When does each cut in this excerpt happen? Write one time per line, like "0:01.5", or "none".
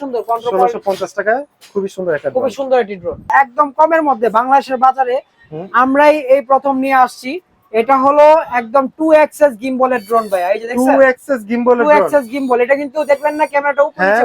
0:03.3